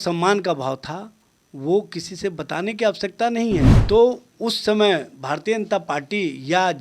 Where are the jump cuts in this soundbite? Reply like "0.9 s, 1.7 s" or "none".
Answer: 3.8 s